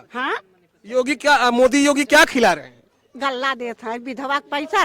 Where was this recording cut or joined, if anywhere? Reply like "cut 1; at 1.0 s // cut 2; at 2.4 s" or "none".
none